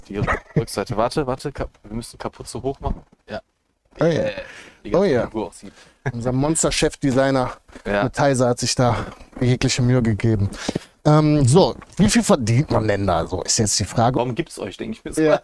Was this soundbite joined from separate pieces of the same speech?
yes; 1 cut; at 14.2 s

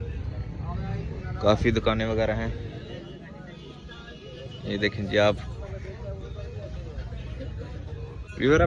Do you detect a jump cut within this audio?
no; 0 cuts

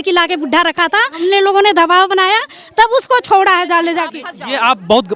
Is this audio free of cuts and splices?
no; 1 cut; at 1.1 s

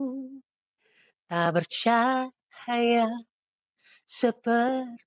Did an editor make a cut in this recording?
no; 0 cuts

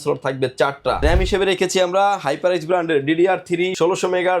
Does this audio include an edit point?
yes; 1 cut; at 1.0 s

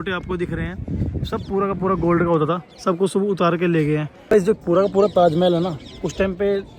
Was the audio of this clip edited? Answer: yes; 1 cut; at 4.1 s

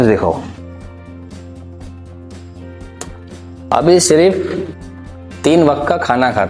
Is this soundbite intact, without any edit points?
yes; 0 cuts

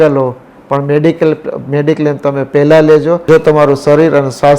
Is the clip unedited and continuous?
no; 1 cut; at 3.2 s

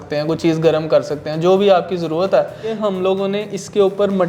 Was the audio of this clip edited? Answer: yes; 1 cut; at 2.8 s

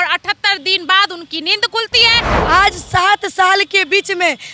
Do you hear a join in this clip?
yes; 1 cut; at 2.3 s

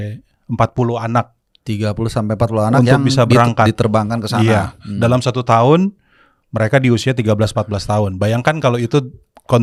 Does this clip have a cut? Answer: no; 0 cuts

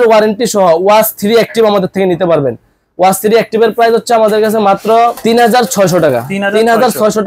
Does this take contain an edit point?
no; 0 cuts

